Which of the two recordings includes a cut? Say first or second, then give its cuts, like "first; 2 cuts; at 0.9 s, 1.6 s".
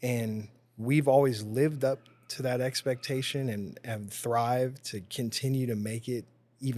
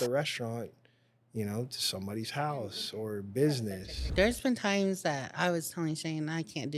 second; 1 cut; at 4.1 s